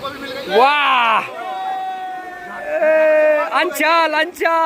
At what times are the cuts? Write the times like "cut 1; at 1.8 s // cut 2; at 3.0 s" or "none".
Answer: none